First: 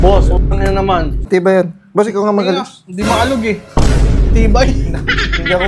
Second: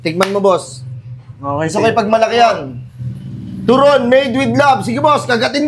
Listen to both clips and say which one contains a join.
first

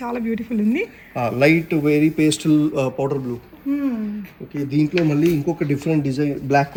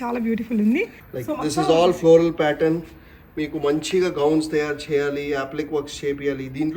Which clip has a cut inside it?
second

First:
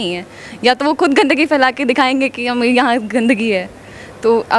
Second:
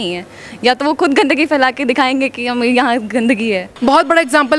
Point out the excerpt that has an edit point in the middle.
second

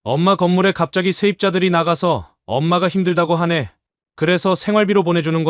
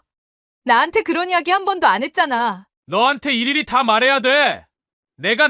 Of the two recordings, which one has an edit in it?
second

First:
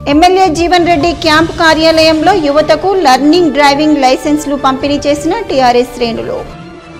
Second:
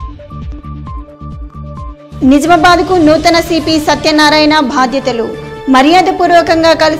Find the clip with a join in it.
second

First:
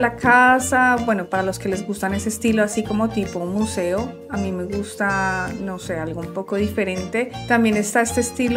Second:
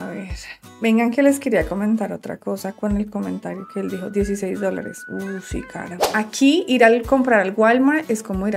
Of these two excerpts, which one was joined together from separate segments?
second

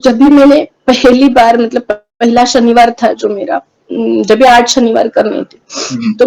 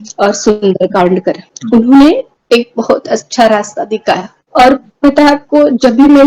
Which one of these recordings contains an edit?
second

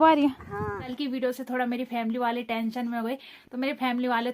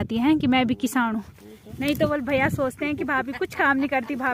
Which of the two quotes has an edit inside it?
first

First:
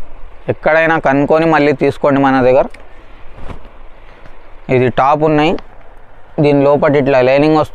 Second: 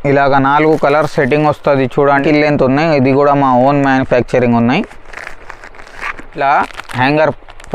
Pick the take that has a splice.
second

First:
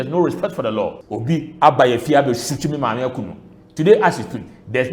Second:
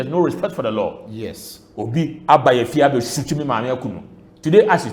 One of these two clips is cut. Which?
first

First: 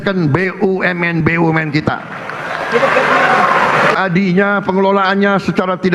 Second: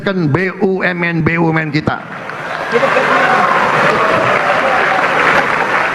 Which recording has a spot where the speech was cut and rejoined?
first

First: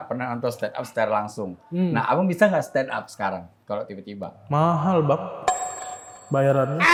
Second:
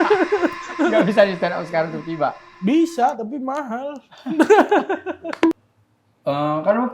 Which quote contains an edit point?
second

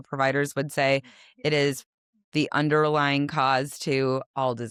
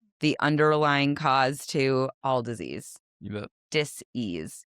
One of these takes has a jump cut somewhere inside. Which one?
second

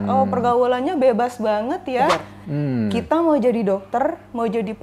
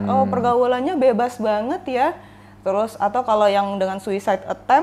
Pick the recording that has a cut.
first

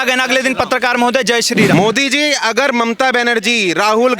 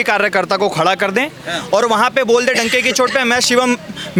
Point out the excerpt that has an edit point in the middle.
first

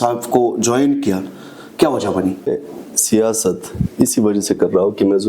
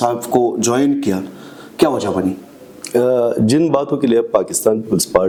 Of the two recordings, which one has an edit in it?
first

